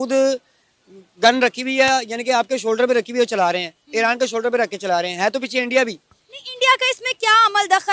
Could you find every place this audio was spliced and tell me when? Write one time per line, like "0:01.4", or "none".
none